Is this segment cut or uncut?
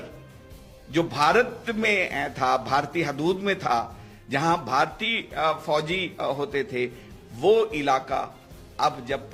uncut